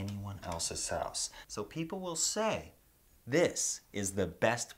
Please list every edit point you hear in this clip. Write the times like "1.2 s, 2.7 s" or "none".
1.3 s